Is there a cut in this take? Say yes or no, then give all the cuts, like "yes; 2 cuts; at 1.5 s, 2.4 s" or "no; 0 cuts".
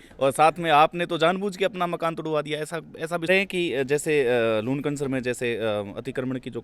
yes; 1 cut; at 3.3 s